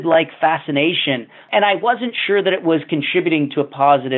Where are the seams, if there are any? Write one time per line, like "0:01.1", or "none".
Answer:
0:01.5